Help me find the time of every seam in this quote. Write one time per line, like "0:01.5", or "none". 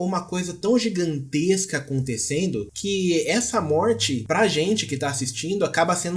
0:02.7
0:04.2